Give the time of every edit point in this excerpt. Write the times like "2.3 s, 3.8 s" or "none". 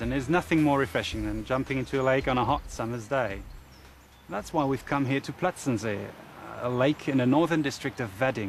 none